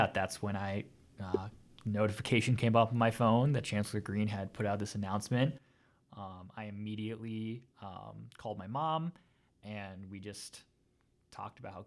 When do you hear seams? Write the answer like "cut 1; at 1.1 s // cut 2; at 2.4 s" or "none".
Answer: none

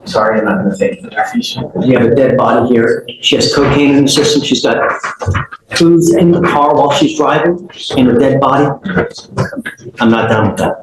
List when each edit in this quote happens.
none

